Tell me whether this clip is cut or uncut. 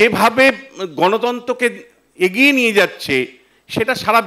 uncut